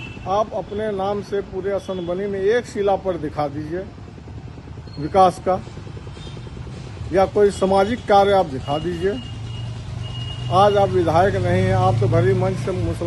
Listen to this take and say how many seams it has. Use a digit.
0